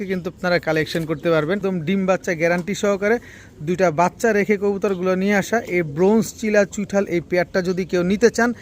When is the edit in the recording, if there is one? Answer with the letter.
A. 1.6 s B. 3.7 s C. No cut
A